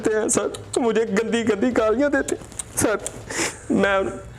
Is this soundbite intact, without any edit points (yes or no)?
yes